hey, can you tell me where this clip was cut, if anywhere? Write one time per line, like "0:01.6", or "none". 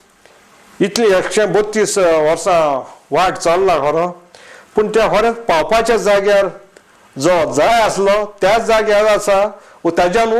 none